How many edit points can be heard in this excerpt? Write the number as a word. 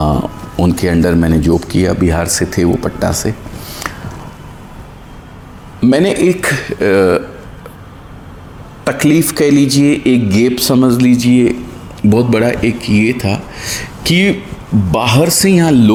zero